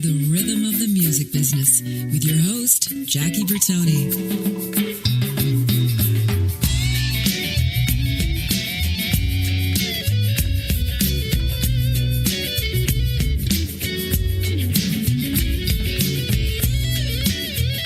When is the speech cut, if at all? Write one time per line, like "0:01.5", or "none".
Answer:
none